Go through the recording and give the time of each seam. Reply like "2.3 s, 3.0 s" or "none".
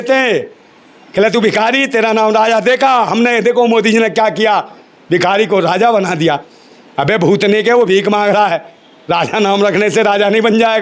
none